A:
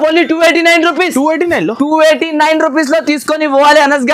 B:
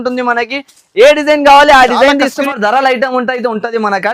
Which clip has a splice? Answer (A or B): B